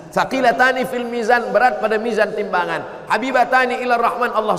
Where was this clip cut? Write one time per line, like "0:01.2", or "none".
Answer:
none